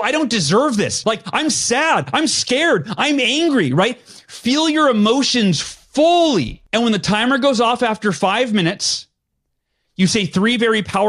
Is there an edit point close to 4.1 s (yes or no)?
no